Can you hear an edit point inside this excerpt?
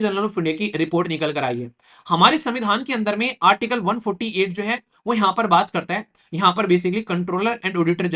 no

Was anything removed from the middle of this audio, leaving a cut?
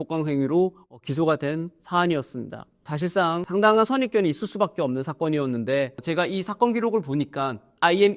yes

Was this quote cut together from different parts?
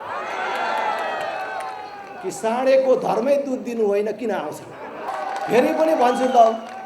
yes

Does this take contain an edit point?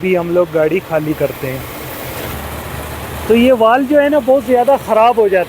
yes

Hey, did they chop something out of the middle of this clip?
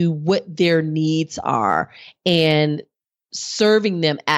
no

